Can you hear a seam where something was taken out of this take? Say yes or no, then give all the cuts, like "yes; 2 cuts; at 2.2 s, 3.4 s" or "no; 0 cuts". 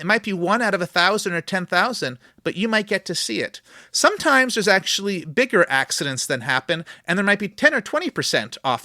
yes; 1 cut; at 7.5 s